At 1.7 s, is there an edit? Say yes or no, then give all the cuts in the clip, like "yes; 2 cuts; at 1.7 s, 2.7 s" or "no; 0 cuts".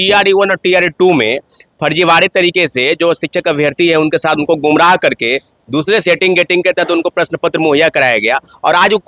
no; 0 cuts